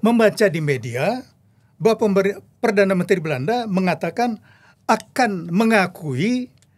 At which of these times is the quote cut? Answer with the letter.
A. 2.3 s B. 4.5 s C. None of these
C